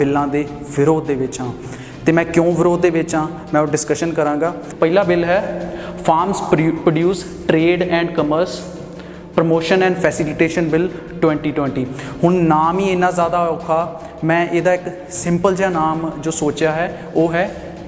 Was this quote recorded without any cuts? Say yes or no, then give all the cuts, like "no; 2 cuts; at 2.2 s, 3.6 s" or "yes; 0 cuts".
no; 1 cut; at 4.6 s